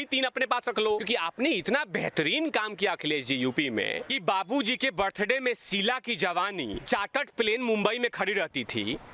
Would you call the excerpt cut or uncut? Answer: cut